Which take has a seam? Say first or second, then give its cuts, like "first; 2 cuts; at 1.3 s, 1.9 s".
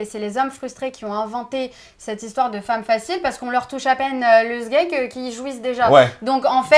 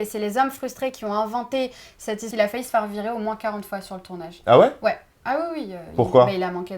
second; 1 cut; at 2.3 s